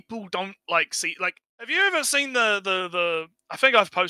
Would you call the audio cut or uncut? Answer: cut